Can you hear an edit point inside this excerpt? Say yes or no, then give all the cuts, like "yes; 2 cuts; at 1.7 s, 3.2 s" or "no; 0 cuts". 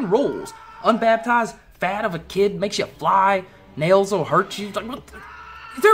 no; 0 cuts